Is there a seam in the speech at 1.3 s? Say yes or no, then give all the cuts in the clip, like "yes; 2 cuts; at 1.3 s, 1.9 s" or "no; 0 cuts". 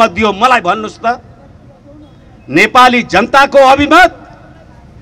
no; 0 cuts